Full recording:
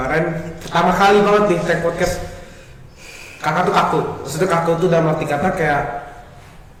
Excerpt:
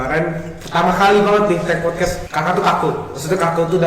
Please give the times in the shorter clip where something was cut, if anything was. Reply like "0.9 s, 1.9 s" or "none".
2.2 s